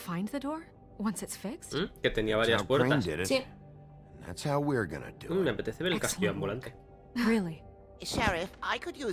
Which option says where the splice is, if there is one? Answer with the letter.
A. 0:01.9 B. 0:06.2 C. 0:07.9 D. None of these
D